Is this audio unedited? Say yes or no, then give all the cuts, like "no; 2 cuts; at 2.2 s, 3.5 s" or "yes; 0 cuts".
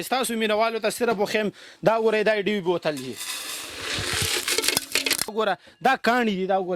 no; 1 cut; at 5.3 s